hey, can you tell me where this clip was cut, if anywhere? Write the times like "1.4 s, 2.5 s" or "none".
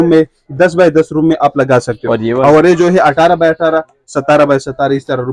none